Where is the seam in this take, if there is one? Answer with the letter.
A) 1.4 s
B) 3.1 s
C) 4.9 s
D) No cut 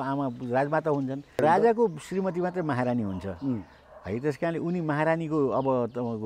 A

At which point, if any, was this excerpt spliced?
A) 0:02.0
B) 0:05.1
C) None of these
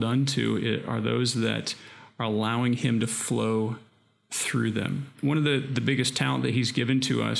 B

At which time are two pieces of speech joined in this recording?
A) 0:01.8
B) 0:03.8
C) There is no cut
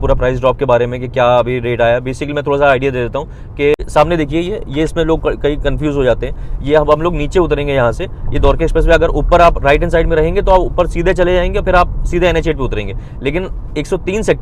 B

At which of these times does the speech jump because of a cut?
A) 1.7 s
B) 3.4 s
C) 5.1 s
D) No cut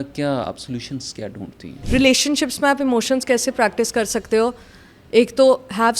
A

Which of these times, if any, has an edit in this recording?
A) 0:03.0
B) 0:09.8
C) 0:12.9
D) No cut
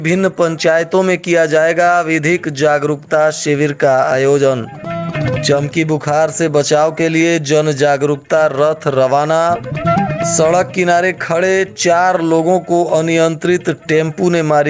D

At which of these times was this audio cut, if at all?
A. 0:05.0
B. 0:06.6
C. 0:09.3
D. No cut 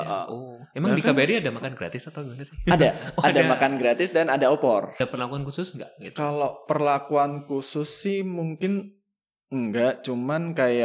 A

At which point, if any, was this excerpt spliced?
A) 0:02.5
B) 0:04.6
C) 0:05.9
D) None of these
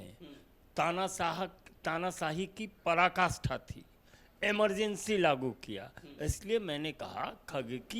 D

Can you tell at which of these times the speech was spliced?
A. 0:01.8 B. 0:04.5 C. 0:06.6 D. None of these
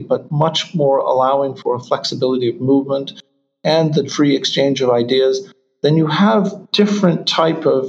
C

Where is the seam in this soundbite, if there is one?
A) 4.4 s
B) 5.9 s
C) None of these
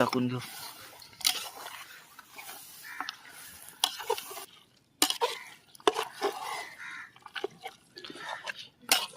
A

